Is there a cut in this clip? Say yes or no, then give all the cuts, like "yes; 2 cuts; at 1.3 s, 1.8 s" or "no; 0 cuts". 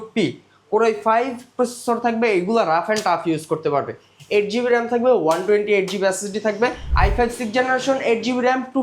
yes; 1 cut; at 6.8 s